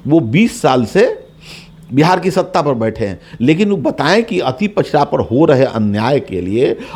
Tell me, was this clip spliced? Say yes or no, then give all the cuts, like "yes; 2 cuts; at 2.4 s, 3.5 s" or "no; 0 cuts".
no; 0 cuts